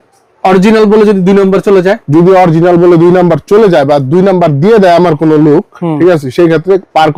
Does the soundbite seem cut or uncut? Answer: uncut